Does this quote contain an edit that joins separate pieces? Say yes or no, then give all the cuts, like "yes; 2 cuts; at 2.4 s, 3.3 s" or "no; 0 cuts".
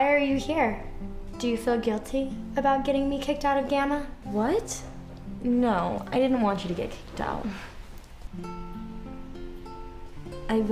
no; 0 cuts